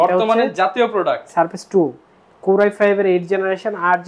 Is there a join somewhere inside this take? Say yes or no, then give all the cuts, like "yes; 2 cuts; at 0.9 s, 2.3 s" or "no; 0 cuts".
no; 0 cuts